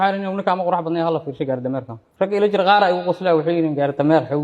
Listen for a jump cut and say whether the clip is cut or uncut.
cut